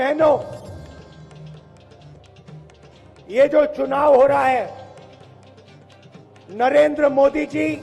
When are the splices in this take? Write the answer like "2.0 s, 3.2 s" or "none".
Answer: 5.1 s, 6.5 s